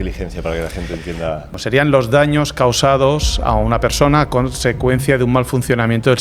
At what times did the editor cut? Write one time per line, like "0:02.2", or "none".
0:01.5